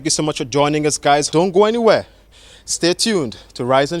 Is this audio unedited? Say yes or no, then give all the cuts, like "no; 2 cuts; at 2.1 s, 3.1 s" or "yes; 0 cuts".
no; 1 cut; at 1.3 s